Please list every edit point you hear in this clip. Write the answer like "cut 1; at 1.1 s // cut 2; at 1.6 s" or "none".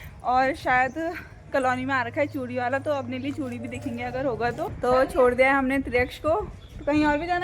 cut 1; at 4.7 s